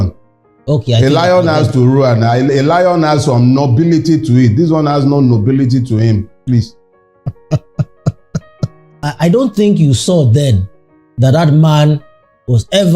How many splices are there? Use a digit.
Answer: 1